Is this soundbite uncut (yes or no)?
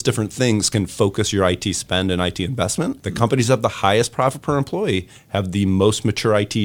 no